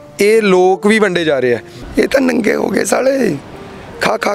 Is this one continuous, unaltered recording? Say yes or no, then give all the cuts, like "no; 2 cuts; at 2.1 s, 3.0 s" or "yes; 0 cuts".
no; 1 cut; at 1.8 s